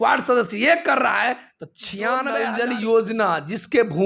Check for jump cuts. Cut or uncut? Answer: cut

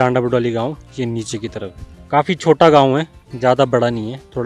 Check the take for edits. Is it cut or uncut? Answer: cut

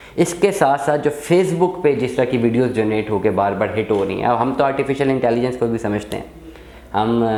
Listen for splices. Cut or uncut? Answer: uncut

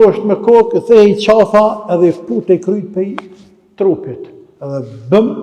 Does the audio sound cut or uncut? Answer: uncut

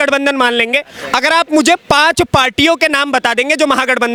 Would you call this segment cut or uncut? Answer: uncut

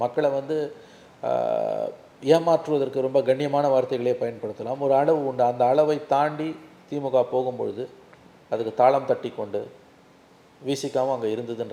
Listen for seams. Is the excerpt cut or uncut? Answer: uncut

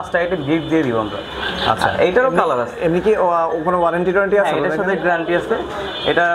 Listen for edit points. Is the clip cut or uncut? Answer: uncut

